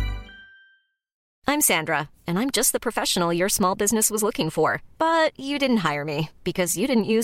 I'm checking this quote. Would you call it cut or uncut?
cut